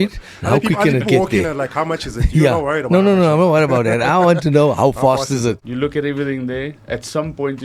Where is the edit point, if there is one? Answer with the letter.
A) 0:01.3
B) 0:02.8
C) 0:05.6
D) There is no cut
C